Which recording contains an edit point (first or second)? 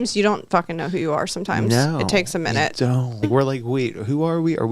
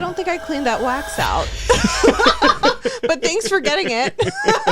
first